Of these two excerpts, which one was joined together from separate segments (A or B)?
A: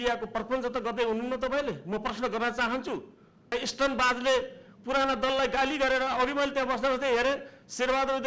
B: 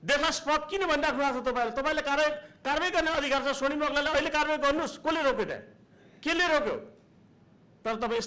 A